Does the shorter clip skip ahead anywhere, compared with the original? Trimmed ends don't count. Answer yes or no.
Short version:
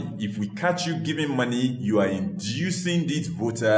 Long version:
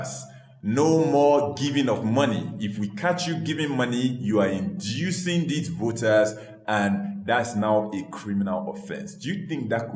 no